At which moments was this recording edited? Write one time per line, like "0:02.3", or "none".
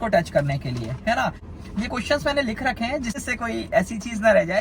0:01.5
0:03.2